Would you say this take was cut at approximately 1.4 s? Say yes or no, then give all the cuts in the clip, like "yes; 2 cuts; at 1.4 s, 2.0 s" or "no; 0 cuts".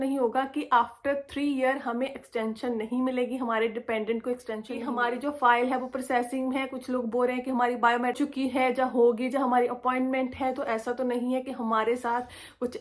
no; 2 cuts; at 4.8 s, 8.2 s